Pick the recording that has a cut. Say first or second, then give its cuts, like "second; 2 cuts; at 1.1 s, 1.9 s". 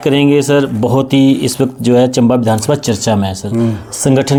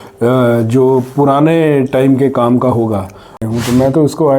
second; 1 cut; at 3.4 s